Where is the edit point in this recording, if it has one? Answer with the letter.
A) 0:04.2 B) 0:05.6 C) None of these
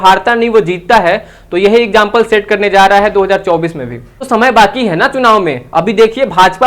A